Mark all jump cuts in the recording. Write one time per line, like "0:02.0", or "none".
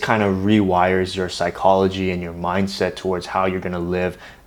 none